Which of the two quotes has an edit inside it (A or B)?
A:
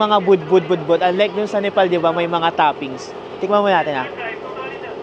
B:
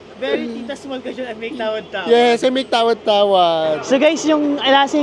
B